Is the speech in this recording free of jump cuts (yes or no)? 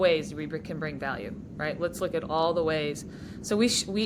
yes